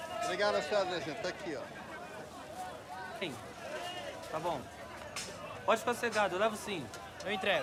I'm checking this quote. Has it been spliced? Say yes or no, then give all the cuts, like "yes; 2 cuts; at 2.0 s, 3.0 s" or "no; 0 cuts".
no; 0 cuts